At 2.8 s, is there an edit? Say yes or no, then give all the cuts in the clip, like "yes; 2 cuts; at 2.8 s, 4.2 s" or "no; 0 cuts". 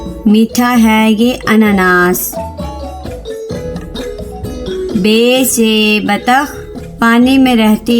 yes; 2 cuts; at 2.8 s, 4.9 s